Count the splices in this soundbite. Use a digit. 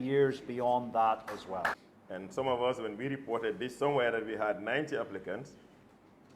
1